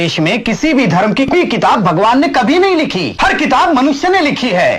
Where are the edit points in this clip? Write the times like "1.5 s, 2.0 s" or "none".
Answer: 1.3 s, 3.1 s